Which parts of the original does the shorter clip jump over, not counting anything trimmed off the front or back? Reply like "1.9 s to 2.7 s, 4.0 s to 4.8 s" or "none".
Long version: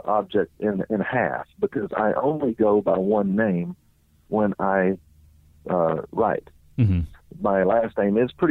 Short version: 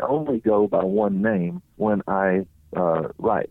3.8 s to 4.1 s, 5.1 s to 5.5 s